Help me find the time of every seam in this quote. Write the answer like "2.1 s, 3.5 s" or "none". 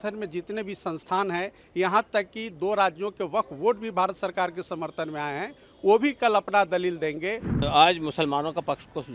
7.4 s